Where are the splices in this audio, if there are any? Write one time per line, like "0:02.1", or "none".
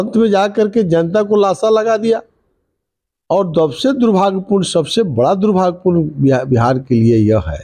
none